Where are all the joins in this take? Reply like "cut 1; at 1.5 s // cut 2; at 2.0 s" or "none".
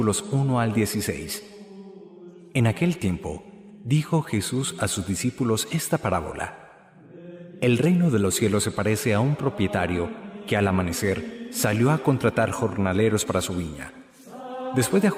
none